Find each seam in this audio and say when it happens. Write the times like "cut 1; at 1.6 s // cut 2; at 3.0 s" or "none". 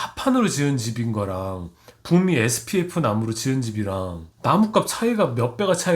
cut 1; at 4.2 s